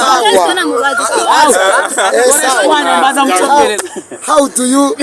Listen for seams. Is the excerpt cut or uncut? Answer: uncut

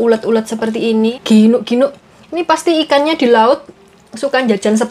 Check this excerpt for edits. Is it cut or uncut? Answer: cut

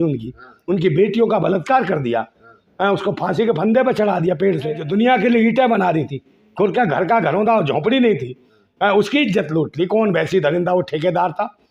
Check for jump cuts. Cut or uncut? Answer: cut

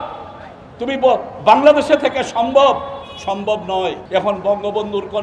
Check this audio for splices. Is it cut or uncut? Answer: cut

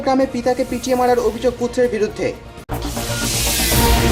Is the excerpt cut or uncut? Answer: uncut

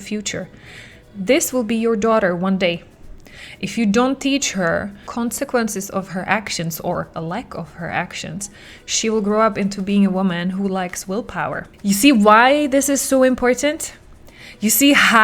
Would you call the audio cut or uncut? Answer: cut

